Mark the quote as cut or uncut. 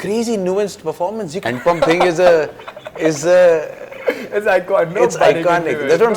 cut